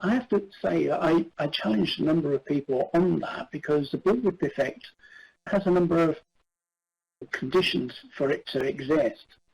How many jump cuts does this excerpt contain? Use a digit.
1